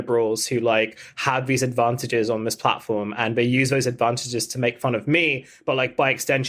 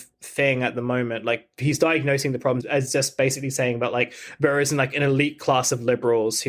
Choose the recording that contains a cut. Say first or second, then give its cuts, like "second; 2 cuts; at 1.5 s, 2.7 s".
second; 1 cut; at 2.6 s